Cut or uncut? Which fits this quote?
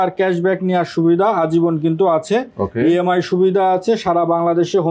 uncut